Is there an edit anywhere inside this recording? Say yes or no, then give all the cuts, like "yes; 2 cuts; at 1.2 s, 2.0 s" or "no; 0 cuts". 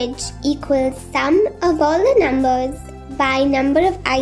no; 0 cuts